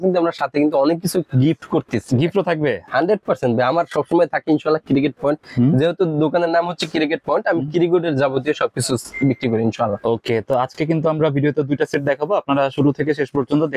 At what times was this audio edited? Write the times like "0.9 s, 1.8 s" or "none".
none